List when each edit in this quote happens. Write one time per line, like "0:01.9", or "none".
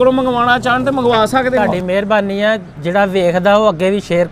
0:01.6